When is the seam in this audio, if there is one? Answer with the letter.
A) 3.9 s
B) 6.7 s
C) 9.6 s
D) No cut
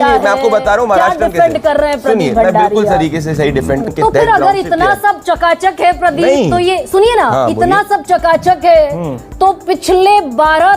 A